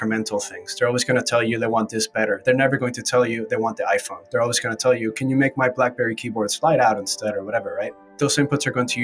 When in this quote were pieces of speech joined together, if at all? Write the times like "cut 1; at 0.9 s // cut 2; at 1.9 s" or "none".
cut 1; at 8.1 s